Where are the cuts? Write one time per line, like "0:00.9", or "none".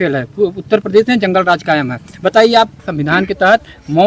0:02.9

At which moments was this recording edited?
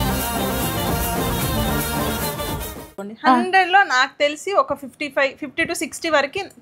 0:02.8

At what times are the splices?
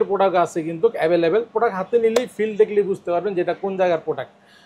none

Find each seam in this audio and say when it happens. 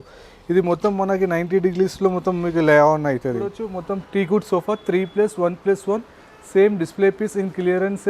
0:03.7

